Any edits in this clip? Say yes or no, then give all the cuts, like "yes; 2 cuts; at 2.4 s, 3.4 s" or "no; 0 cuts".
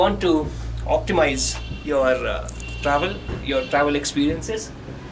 no; 0 cuts